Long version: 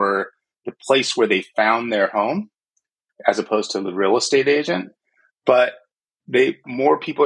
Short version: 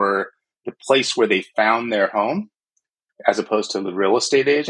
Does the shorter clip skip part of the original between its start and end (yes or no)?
no